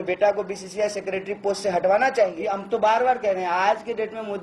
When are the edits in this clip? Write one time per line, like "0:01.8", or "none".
0:02.6